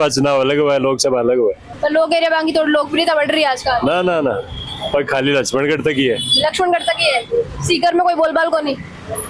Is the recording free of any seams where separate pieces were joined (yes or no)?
yes